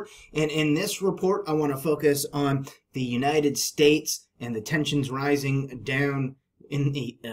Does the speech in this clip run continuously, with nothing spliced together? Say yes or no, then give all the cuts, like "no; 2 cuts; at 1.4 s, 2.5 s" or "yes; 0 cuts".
yes; 0 cuts